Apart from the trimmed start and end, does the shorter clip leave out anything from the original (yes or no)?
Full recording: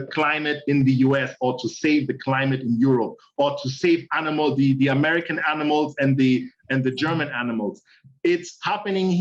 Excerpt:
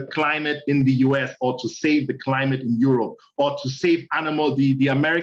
no